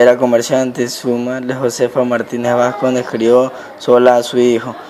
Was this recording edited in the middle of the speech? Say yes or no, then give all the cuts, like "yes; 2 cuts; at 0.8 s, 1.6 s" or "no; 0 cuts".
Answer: yes; 1 cut; at 3.1 s